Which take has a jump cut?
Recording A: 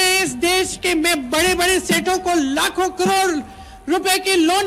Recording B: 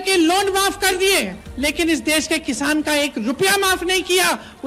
B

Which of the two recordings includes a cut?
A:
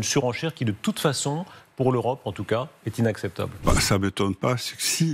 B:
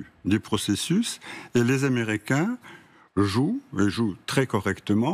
A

